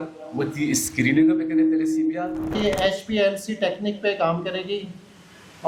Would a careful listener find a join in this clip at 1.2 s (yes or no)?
no